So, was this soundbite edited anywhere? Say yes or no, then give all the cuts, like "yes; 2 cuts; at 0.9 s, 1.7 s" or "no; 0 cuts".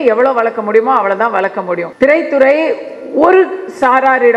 yes; 1 cut; at 1.8 s